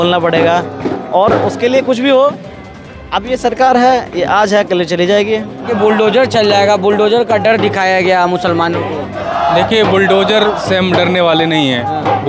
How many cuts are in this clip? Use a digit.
1